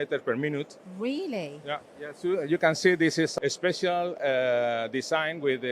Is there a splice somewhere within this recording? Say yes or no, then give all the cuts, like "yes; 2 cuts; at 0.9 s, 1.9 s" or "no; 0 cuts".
yes; 1 cut; at 3.3 s